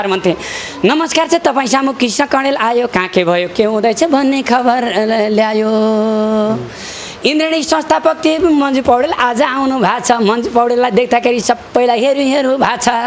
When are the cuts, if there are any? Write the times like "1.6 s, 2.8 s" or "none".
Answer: 11.6 s